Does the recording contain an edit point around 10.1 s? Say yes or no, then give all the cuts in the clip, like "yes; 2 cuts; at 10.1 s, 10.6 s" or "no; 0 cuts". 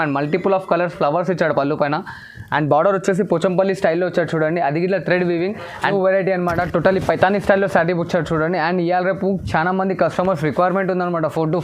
no; 1 cut; at 5.8 s